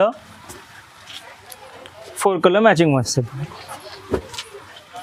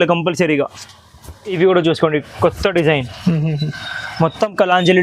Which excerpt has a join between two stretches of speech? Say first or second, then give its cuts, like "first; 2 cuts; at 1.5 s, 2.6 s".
second; 1 cut; at 1.6 s